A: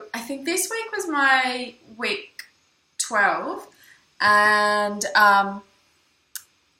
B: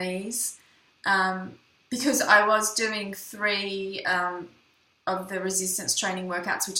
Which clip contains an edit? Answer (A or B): A